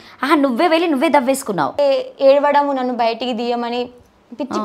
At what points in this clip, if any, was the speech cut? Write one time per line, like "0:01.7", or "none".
0:01.8